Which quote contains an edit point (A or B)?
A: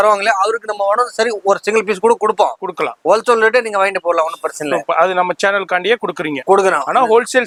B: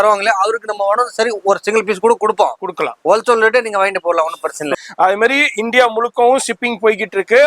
B